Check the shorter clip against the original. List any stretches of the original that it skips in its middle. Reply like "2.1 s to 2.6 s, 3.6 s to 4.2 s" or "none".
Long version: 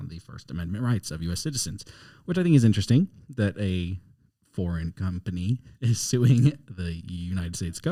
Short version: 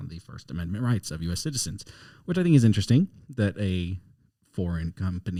none